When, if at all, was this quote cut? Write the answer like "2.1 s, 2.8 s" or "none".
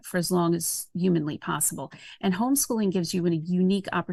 none